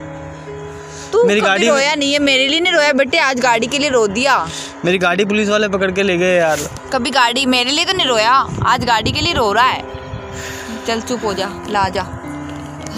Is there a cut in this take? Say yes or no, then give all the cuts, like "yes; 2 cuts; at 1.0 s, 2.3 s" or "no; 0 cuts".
no; 0 cuts